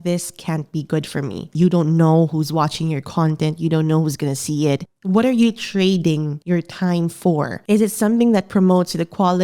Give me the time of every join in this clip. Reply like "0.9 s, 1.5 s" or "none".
1.5 s, 4.9 s, 6.3 s